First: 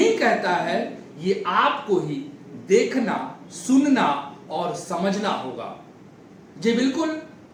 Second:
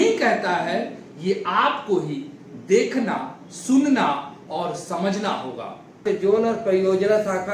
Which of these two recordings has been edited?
second; 1 cut; at 6.0 s

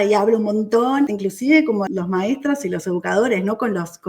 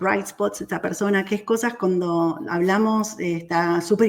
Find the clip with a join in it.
first; 2 cuts; at 1.1 s, 1.9 s

